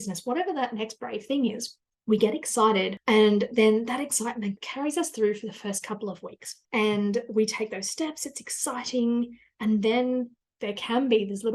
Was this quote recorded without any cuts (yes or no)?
no